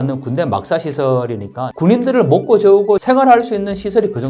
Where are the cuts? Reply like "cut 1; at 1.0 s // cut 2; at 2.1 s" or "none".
cut 1; at 1.6 s // cut 2; at 3.0 s